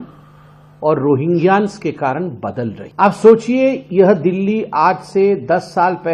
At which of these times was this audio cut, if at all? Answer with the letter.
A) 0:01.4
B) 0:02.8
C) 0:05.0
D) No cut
B